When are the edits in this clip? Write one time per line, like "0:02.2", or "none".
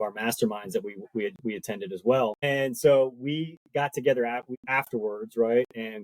0:02.4
0:04.5